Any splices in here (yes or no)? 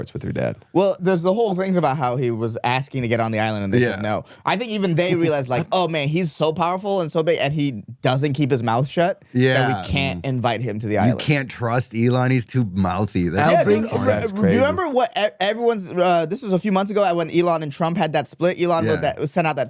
yes